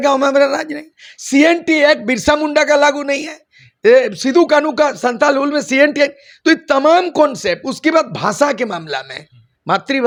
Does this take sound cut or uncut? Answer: uncut